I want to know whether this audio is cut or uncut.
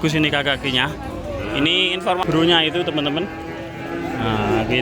cut